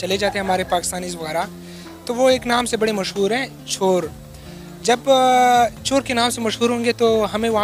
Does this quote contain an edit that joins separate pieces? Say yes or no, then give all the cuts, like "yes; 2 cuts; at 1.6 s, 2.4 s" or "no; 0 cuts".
no; 0 cuts